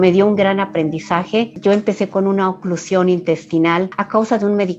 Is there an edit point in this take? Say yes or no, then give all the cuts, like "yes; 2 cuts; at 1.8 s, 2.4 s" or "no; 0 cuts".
yes; 1 cut; at 1.5 s